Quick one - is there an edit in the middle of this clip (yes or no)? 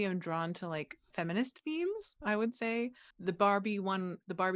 yes